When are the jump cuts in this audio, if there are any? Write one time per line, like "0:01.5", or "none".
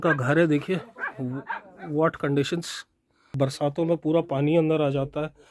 0:03.3